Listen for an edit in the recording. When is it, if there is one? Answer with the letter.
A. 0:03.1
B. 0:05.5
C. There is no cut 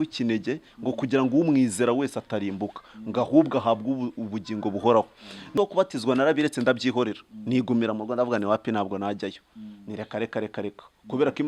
B